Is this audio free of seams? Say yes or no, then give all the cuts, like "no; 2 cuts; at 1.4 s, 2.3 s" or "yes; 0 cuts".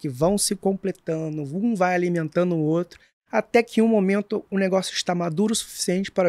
no; 1 cut; at 4.5 s